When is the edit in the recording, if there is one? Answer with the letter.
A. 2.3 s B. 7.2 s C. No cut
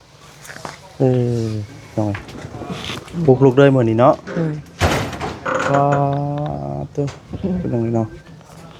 A